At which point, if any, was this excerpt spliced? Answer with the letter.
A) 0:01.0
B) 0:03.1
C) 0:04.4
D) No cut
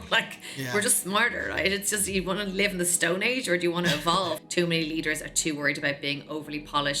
C